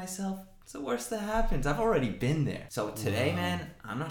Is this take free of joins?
no; 1 cut; at 2.6 s

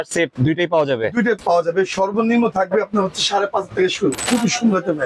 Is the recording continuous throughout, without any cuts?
no; 2 cuts; at 1.4 s, 4.3 s

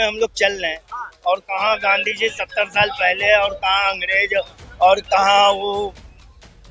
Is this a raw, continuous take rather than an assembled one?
yes; 0 cuts

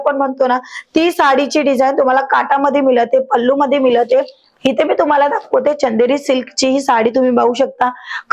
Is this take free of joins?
no; 1 cut; at 4.4 s

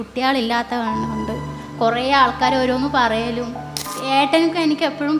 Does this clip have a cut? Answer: yes; 1 cut; at 3.9 s

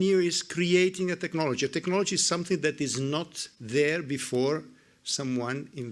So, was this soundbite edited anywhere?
no; 0 cuts

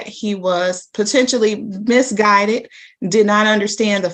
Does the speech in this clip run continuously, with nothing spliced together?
yes; 0 cuts

